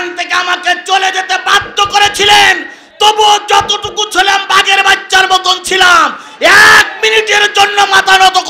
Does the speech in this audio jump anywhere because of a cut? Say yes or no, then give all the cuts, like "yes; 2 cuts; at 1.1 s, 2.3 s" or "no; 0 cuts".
no; 0 cuts